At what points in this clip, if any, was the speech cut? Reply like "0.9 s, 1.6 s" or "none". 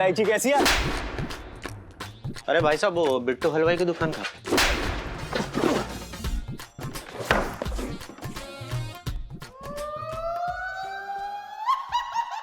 none

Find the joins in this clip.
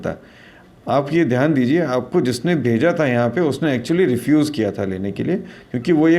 none

